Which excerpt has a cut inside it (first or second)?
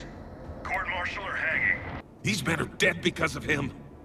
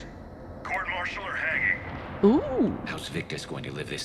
first